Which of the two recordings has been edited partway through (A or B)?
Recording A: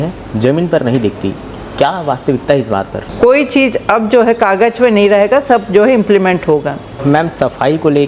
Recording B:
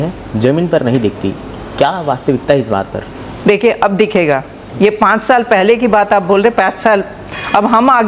A